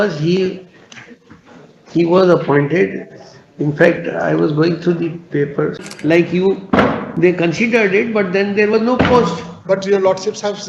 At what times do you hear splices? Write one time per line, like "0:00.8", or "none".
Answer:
0:05.9